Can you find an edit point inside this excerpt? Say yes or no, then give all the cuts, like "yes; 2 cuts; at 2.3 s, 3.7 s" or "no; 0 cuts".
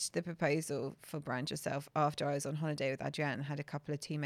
no; 0 cuts